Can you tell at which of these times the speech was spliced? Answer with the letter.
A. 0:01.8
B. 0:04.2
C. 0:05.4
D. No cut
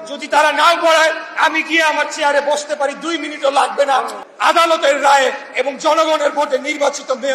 B